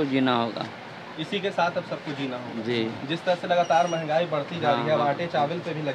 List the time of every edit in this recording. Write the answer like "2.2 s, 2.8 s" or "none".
none